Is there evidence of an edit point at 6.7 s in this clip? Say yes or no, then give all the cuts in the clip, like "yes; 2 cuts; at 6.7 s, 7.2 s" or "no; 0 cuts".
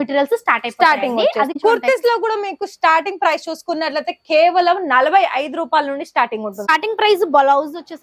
yes; 2 cuts; at 1.5 s, 6.7 s